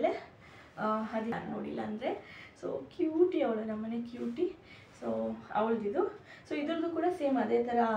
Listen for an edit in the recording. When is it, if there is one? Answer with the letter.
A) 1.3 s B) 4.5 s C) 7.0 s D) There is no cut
A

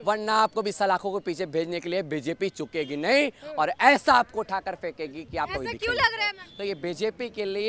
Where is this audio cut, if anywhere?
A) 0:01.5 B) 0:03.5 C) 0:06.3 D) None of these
C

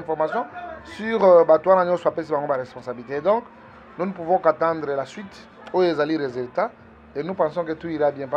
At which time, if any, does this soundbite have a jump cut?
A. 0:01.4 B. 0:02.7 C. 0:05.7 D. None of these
D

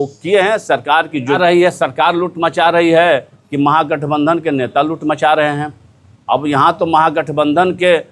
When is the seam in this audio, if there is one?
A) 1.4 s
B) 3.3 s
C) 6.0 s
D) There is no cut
A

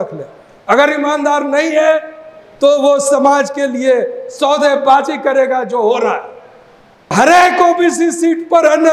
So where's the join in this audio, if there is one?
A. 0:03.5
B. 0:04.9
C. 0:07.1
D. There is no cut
C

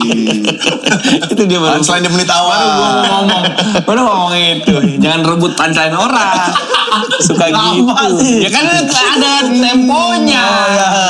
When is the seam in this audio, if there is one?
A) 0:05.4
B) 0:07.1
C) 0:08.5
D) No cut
D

